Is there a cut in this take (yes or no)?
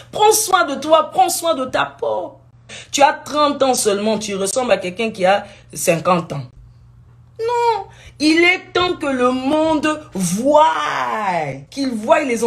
yes